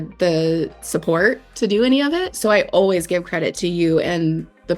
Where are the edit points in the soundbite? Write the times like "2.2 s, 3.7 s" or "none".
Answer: 2.3 s, 3.5 s